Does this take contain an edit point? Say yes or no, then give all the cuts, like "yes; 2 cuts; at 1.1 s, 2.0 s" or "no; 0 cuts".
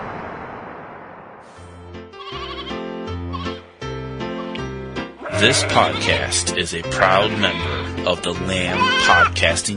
yes; 1 cut; at 1.7 s